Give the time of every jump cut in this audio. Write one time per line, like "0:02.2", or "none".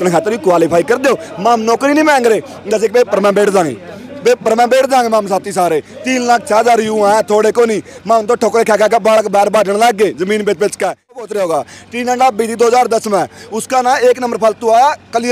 0:11.2